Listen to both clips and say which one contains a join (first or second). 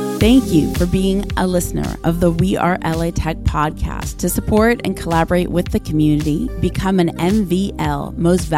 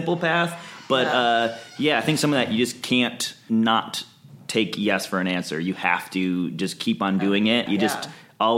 second